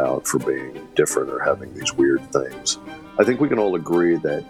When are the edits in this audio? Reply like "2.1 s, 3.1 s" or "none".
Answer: none